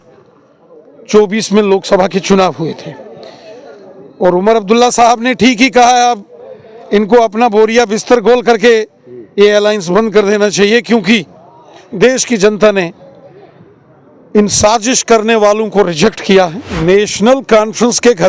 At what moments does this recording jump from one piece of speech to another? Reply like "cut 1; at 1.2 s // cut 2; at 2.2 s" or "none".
cut 1; at 16.7 s